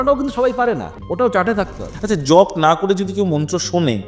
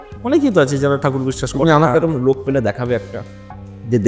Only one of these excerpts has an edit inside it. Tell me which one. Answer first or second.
first